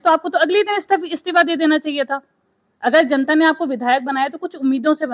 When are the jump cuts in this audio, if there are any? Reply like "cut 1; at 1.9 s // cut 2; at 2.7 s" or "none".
none